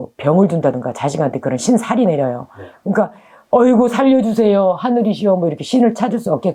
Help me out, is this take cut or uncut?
uncut